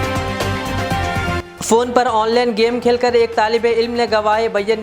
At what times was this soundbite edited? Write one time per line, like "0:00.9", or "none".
none

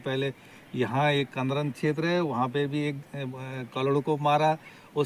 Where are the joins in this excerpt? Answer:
none

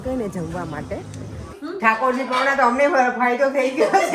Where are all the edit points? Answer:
0:01.6

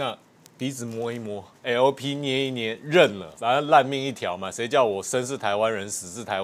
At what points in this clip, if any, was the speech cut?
0:01.6
0:03.3

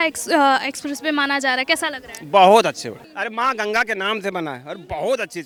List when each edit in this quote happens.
none

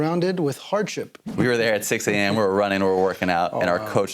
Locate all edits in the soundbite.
0:01.2

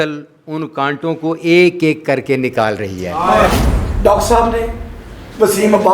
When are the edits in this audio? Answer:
0:03.5

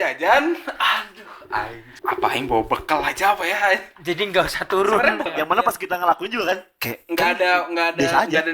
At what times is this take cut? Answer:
0:01.8
0:05.3

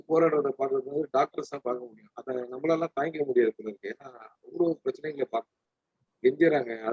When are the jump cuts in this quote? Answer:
none

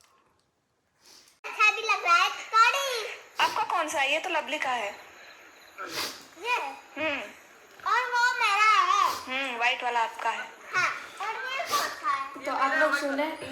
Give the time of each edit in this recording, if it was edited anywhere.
0:01.5

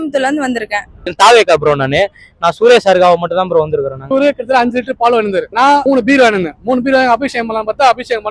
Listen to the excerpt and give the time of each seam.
0:01.0
0:04.0
0:05.8

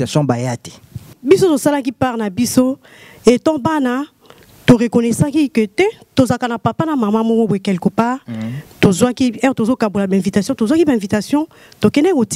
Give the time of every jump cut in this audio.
0:01.1

